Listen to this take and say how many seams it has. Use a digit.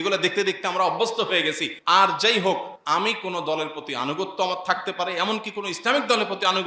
2